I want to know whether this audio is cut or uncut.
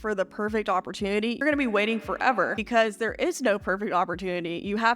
cut